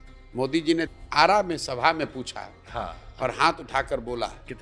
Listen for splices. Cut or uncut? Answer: cut